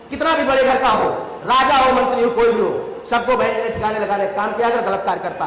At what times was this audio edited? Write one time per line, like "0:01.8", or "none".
none